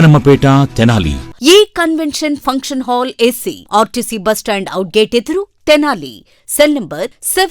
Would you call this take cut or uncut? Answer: cut